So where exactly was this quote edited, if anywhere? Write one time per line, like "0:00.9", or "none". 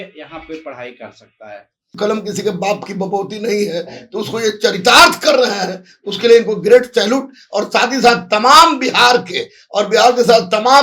0:01.9

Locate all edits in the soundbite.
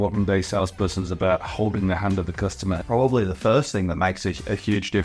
0:02.8

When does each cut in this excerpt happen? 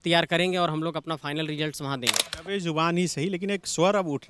0:02.3

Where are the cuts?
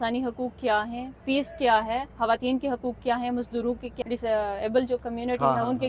0:03.9

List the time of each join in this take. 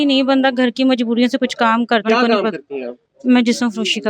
0:02.0

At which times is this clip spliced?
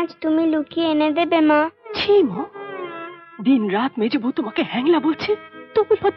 none

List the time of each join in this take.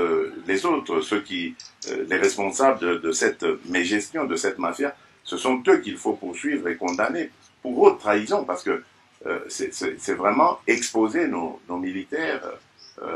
none

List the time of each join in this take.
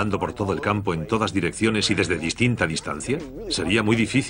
none

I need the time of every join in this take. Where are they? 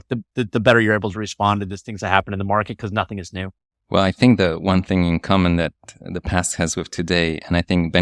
none

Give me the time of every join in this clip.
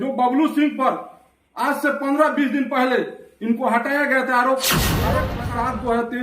0:05.2

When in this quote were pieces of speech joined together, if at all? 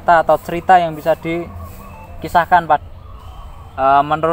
0:02.8

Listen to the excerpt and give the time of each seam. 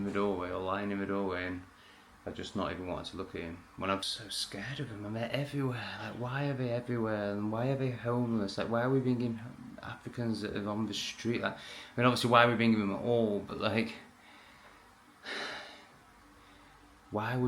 0:04.0

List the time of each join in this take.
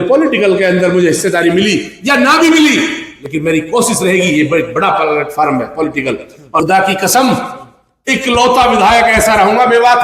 0:06.6

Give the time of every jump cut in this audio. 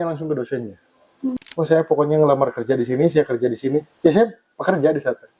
0:01.3

